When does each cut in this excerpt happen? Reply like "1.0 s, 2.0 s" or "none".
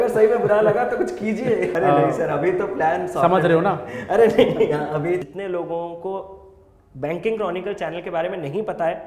1.7 s, 5.2 s